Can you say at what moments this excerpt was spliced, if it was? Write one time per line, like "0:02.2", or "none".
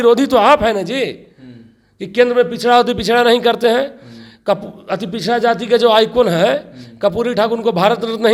none